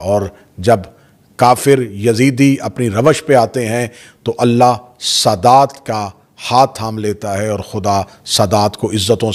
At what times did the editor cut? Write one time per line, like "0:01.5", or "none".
none